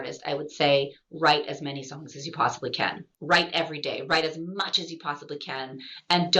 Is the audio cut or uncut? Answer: cut